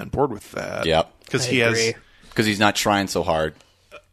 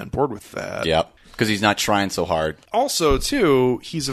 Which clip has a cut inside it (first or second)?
second